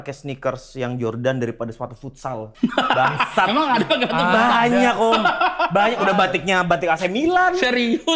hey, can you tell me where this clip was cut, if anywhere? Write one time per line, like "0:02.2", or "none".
0:02.5